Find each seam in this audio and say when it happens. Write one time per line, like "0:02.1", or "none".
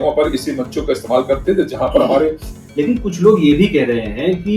0:02.5